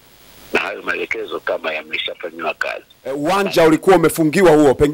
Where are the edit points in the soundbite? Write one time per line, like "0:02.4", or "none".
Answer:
0:03.2